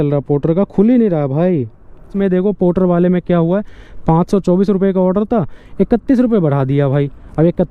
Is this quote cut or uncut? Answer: cut